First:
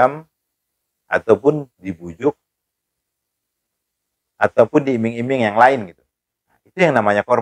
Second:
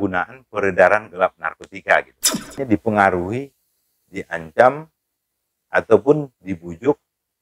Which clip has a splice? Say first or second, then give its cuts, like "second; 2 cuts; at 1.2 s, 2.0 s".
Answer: second; 1 cut; at 2.5 s